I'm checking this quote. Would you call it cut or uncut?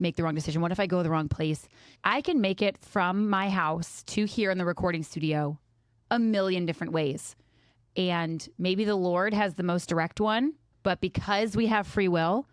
cut